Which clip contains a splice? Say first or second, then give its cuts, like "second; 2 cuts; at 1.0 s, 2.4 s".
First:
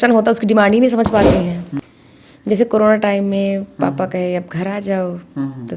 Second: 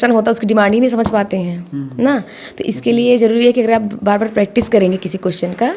first; 1 cut; at 1.8 s